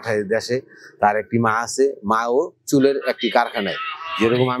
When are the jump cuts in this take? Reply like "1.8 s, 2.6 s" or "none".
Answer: none